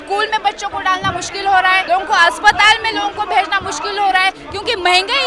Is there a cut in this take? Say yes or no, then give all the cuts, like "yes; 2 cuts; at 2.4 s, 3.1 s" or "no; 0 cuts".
yes; 1 cut; at 1.8 s